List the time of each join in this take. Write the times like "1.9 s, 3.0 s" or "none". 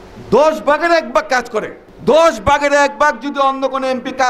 1.8 s